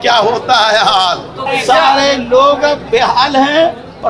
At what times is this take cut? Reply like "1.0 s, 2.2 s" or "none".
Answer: 1.4 s